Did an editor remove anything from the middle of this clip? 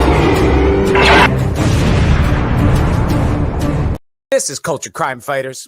yes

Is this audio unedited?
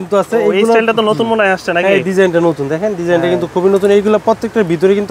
yes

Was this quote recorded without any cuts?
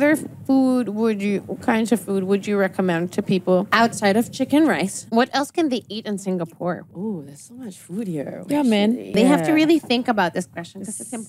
no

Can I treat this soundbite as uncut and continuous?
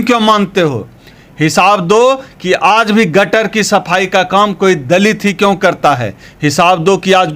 yes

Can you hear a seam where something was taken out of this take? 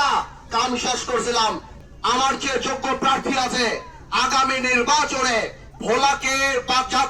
yes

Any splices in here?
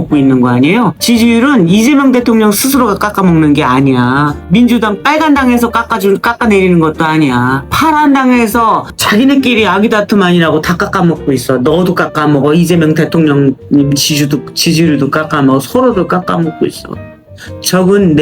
no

